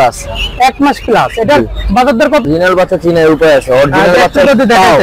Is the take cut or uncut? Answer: cut